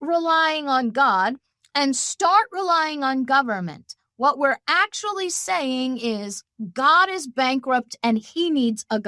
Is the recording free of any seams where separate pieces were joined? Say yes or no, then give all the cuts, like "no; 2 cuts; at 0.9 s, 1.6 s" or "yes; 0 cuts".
yes; 0 cuts